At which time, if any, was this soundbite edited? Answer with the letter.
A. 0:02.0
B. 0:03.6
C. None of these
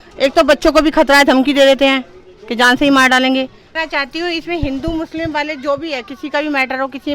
B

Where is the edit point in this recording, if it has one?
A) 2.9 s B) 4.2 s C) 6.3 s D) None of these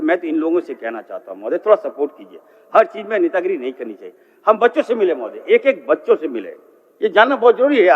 D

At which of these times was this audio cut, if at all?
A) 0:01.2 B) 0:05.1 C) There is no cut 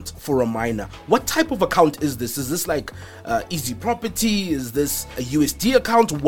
B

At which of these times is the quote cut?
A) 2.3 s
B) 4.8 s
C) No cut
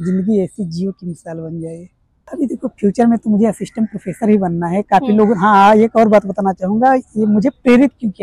A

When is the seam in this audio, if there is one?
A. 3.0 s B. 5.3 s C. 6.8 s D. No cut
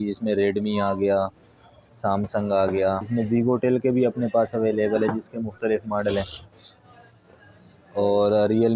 A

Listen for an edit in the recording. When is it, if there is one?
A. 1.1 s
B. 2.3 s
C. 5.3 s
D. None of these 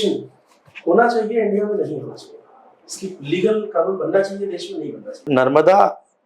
C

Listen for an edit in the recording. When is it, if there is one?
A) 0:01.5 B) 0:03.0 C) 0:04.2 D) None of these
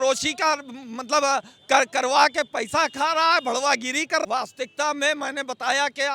C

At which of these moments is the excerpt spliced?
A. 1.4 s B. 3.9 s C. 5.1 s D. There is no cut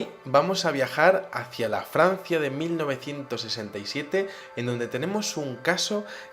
A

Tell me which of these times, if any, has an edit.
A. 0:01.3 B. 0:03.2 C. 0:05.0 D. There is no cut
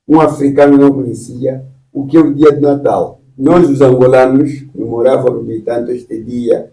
B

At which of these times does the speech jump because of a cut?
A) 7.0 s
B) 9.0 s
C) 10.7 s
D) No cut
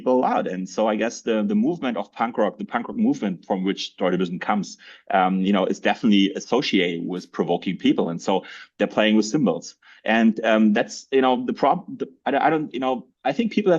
D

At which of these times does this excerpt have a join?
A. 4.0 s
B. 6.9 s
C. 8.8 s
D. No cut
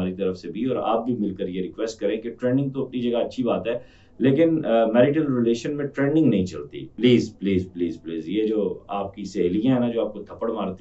B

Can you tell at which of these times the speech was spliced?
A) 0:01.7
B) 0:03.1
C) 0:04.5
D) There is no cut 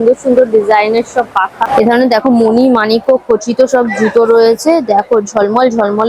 A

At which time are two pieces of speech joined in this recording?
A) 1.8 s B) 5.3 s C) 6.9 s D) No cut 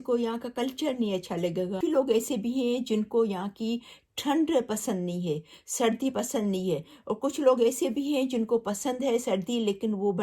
A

